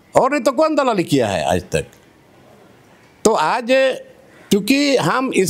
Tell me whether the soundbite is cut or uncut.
uncut